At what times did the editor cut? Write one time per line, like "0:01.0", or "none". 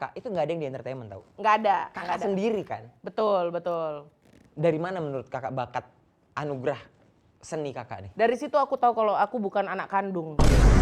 none